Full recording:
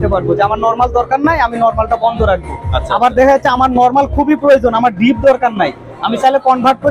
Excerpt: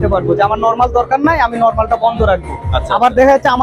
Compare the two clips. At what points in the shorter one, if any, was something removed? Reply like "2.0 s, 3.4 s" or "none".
none